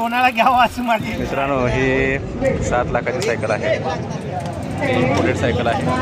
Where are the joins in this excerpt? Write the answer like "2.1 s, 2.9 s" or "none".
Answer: 1.2 s